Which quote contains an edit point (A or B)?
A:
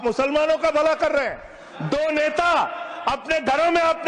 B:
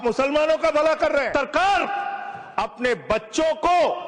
B